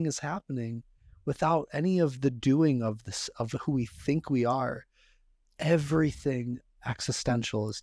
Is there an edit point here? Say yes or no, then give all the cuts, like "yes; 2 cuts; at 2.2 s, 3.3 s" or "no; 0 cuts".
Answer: no; 0 cuts